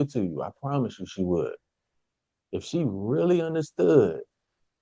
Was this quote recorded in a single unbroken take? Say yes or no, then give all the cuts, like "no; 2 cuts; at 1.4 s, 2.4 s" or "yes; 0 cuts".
yes; 0 cuts